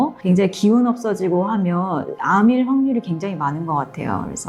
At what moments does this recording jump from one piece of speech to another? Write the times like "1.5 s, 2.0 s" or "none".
none